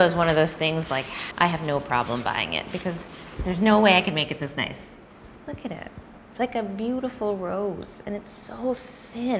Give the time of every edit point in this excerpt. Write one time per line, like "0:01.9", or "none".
none